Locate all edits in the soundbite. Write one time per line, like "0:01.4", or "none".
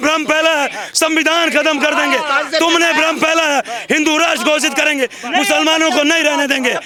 none